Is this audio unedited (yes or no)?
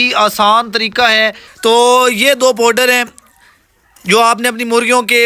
no